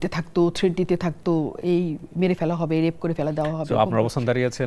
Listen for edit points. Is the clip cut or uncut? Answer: uncut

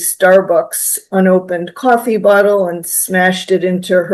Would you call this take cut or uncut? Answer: uncut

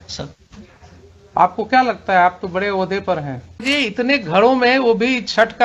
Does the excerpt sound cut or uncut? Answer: cut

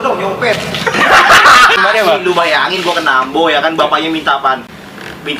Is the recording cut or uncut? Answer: cut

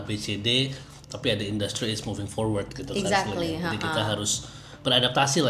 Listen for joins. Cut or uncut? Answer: uncut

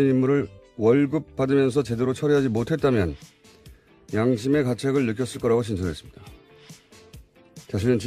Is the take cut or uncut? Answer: uncut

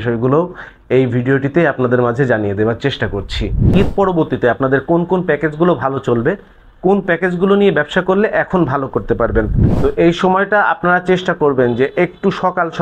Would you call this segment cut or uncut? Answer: cut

